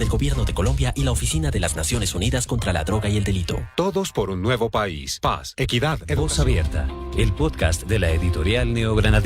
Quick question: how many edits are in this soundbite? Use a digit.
1